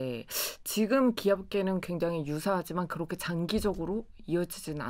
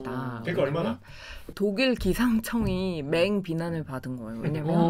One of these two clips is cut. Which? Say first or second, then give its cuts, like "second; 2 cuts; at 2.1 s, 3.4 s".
second; 1 cut; at 1.5 s